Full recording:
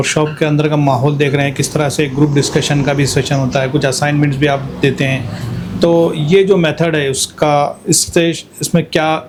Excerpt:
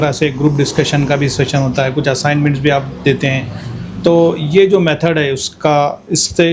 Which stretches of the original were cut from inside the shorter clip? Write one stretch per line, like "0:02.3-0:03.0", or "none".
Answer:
none